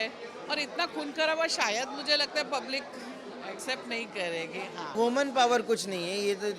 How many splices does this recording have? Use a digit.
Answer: 1